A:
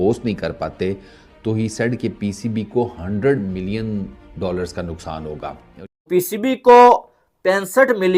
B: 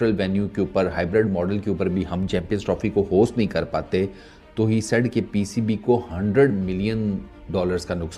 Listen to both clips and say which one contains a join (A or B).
A